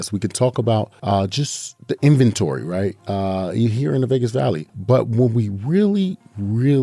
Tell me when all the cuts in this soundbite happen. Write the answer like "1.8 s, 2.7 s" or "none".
0.9 s, 4.7 s